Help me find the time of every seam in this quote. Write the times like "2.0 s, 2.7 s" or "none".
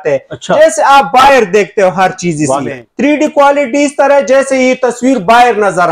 2.8 s